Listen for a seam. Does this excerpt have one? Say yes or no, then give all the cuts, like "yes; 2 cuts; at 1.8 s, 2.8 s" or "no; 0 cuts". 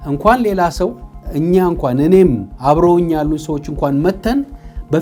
no; 0 cuts